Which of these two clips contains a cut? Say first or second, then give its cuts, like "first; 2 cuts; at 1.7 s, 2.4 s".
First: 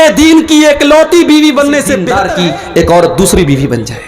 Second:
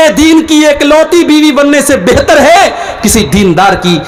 first; 1 cut; at 2.1 s